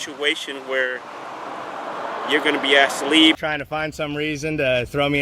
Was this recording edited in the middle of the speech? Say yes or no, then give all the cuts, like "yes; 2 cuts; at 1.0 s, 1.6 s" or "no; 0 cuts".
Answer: yes; 1 cut; at 3.4 s